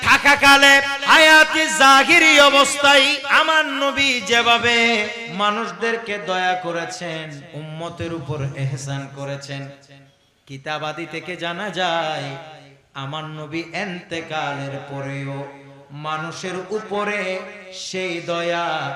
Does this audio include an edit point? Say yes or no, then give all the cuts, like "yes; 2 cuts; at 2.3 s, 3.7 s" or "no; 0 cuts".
yes; 4 cuts; at 0.9 s, 3.2 s, 5.2 s, 7.4 s